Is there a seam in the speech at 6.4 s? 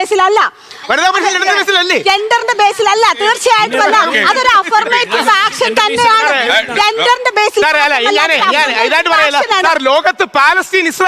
no; 1 cut; at 1.0 s

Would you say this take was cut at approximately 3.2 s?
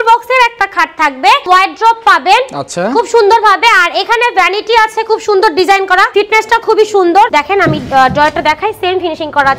no; 3 cuts; at 1.4 s, 6.1 s, 7.3 s

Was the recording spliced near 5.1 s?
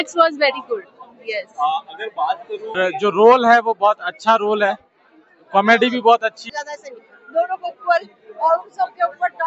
no; 2 cuts; at 2.7 s, 6.4 s

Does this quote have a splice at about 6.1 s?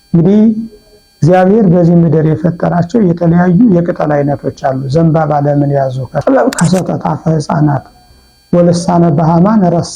yes; 1 cut; at 6.1 s

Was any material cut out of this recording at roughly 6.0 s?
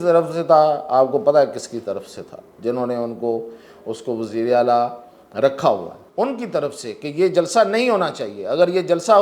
yes; 1 cut; at 6.0 s

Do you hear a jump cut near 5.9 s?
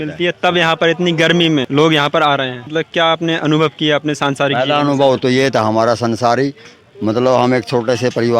no; 2 cuts; at 1.7 s, 2.6 s

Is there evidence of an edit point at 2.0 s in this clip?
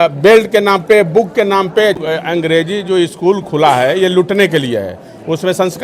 yes; 1 cut; at 2.0 s

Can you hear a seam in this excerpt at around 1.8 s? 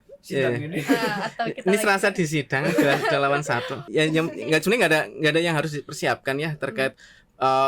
no; 1 cut; at 3.8 s

